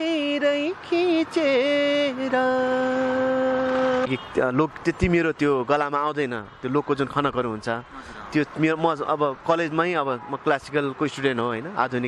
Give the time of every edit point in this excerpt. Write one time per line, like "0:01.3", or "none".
0:04.1